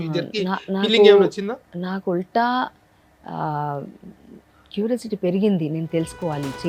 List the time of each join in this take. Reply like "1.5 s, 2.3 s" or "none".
none

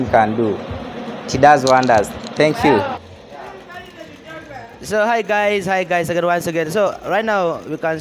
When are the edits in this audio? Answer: none

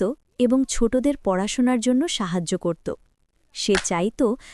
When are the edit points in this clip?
none

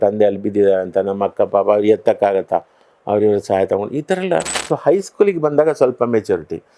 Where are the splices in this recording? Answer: 4.5 s

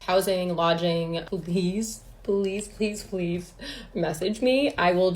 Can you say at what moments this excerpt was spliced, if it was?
1.2 s

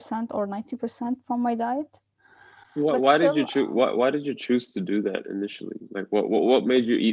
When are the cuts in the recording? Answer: none

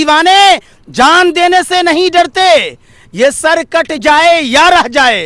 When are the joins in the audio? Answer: none

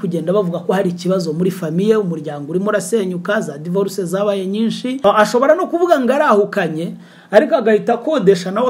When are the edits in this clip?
5.0 s

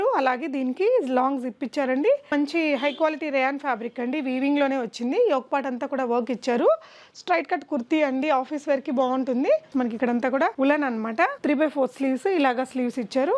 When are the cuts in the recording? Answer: 2.3 s, 9.7 s

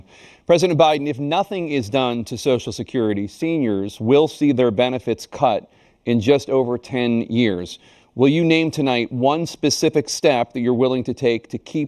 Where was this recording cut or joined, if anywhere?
none

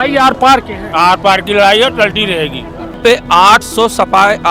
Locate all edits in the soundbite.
3.0 s

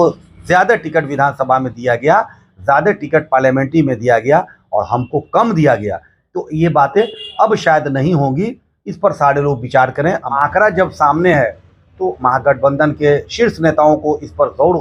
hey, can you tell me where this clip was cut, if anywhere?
10.3 s

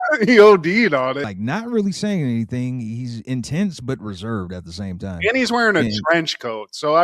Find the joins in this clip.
1.3 s

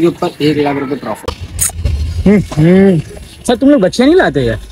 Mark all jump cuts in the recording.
1.3 s

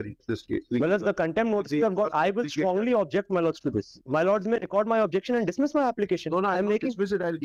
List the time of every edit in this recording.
none

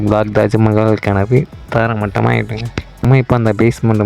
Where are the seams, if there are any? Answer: 3.1 s

